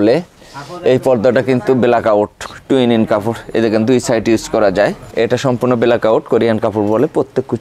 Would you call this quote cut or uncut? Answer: cut